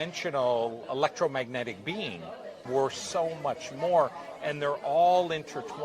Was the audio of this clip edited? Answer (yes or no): yes